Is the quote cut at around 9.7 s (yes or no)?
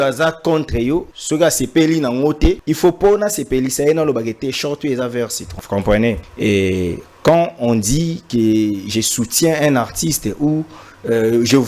no